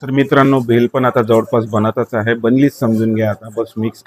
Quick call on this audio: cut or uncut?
uncut